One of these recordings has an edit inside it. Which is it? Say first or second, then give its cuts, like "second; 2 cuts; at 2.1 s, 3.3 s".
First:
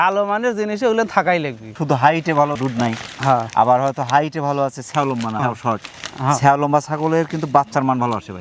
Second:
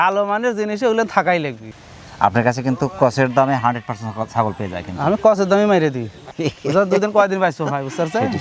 second; 2 cuts; at 1.7 s, 6.2 s